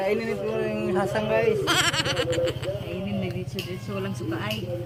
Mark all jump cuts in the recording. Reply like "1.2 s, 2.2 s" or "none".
none